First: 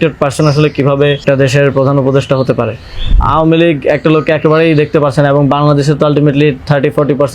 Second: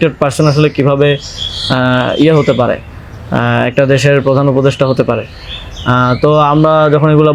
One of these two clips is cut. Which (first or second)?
first